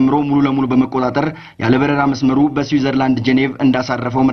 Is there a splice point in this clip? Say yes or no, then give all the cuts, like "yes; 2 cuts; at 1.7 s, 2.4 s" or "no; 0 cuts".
no; 0 cuts